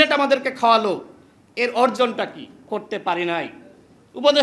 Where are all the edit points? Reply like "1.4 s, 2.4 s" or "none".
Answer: 2.6 s